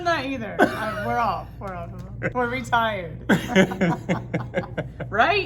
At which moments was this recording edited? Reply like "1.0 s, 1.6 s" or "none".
none